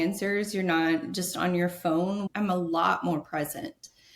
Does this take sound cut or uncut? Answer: cut